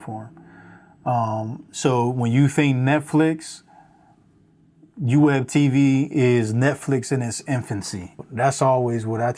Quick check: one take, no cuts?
no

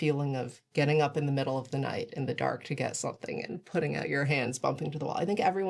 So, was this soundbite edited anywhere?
no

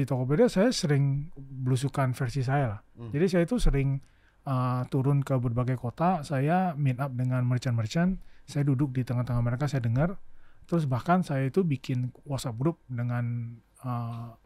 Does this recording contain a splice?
no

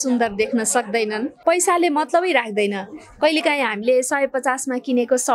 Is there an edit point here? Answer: yes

